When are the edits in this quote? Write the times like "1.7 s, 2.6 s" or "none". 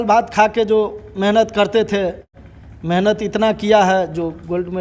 2.3 s